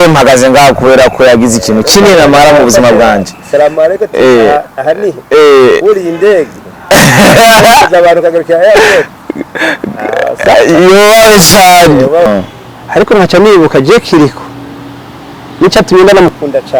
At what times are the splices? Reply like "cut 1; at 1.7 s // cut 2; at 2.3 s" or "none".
cut 1; at 12.3 s